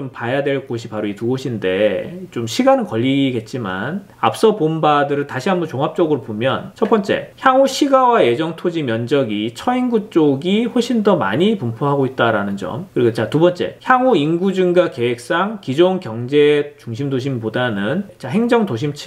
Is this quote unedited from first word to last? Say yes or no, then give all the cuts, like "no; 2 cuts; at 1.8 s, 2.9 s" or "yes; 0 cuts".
yes; 0 cuts